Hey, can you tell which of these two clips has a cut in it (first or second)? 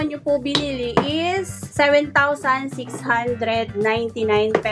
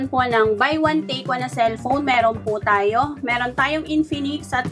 first